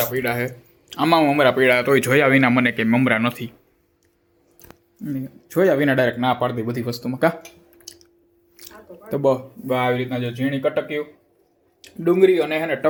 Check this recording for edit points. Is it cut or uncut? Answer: uncut